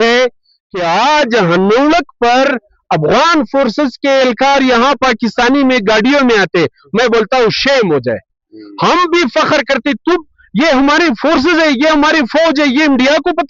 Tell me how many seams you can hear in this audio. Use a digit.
0